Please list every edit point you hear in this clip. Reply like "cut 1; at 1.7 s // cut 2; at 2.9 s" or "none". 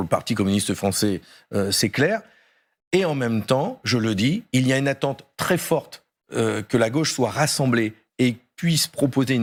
none

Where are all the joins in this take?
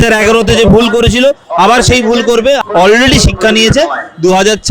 cut 1; at 2.6 s

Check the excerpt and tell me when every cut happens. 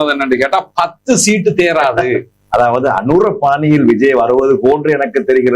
cut 1; at 2.4 s

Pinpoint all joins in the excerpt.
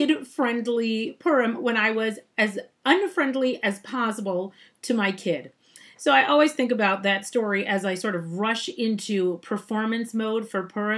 cut 1; at 4.8 s

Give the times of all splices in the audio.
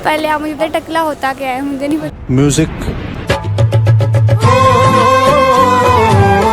none

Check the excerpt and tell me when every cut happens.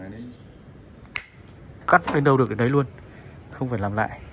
cut 1; at 1.9 s

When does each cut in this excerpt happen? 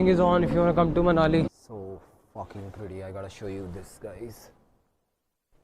cut 1; at 1.5 s

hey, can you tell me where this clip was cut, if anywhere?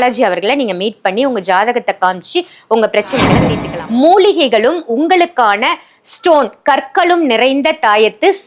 cut 1; at 3.5 s

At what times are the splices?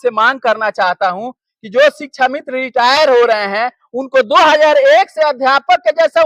none

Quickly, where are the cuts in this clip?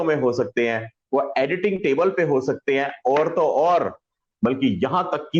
cut 1; at 4.2 s

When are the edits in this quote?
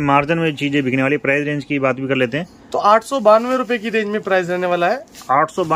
none

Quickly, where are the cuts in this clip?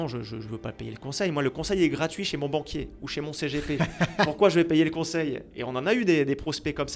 none

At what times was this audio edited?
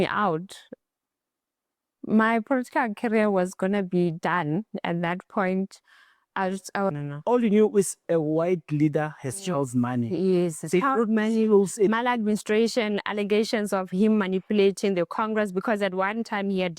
cut 1; at 6.9 s

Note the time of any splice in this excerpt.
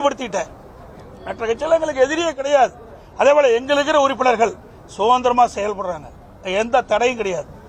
none

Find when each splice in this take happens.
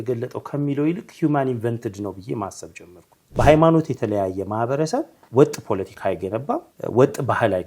cut 1; at 3.4 s // cut 2; at 5.2 s // cut 3; at 6.7 s

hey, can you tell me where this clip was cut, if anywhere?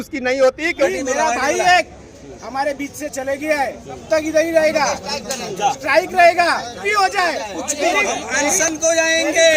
cut 1; at 0.9 s // cut 2; at 4.0 s // cut 3; at 6.8 s

